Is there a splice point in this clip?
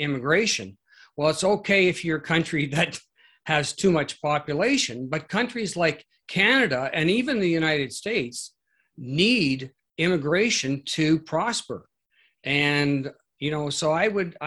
no; 0 cuts

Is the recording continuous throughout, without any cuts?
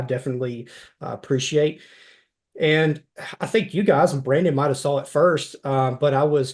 yes; 0 cuts

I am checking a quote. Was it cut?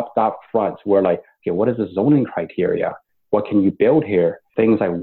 no; 0 cuts

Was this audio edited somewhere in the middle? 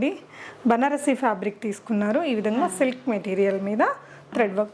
no; 0 cuts

